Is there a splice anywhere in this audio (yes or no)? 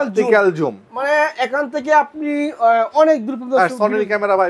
no